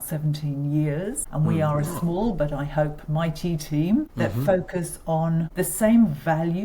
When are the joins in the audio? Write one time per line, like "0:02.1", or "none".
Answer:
0:01.2
0:04.1
0:05.5